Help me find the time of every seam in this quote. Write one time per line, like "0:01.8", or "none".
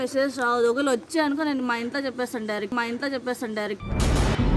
none